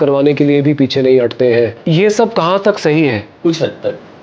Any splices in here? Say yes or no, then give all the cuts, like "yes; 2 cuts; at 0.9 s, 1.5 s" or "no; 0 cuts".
yes; 1 cut; at 1.8 s